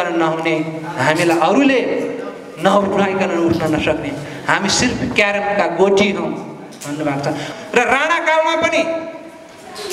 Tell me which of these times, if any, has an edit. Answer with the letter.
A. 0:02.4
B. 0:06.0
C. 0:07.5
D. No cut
C